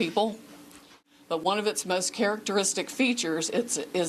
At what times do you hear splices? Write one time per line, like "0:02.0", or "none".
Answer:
0:01.1